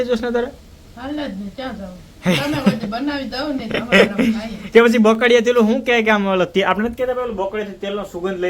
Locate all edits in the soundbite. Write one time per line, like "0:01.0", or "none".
none